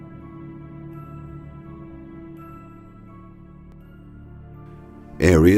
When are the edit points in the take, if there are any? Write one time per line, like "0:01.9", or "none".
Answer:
0:02.1